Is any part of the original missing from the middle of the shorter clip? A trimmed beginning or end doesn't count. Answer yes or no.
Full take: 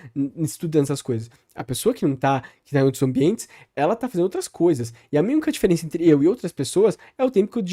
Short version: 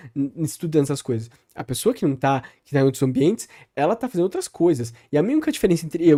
no